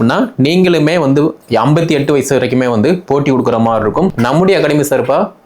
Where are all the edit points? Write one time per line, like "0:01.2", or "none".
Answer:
0:04.1